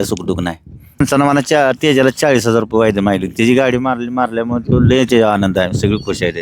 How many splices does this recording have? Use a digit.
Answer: 1